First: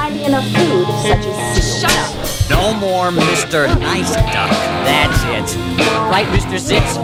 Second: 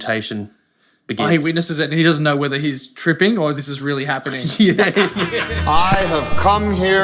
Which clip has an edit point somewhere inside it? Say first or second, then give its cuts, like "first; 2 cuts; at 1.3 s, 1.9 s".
second; 1 cut; at 5.5 s